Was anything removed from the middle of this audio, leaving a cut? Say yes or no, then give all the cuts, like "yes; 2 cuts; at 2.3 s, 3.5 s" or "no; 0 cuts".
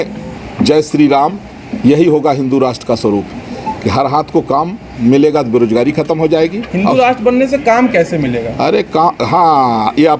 no; 0 cuts